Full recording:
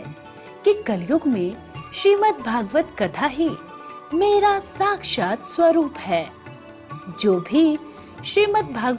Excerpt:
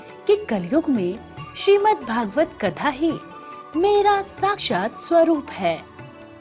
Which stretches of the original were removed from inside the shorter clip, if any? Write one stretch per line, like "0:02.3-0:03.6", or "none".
0:05.0-0:05.1